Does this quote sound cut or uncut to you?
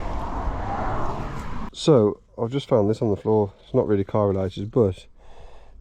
cut